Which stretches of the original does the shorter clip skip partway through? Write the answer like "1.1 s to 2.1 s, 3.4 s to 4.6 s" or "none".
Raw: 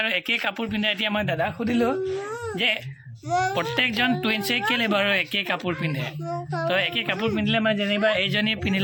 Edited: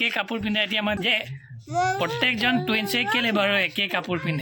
1.3 s to 2.5 s